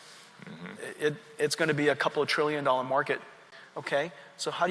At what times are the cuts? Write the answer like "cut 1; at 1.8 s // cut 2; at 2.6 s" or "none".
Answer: cut 1; at 3.5 s